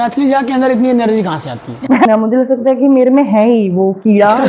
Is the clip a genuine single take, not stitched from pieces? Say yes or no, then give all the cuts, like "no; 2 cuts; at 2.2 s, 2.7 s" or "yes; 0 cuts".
no; 1 cut; at 2.0 s